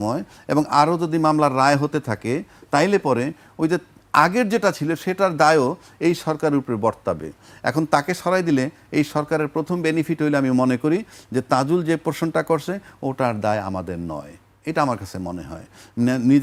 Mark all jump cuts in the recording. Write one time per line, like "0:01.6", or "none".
none